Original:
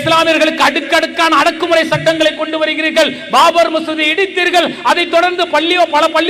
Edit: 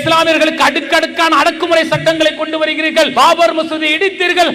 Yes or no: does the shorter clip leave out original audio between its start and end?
yes